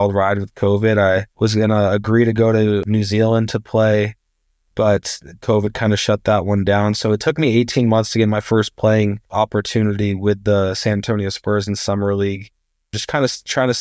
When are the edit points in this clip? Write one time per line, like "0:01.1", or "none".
0:01.3
0:02.8
0:09.2
0:13.0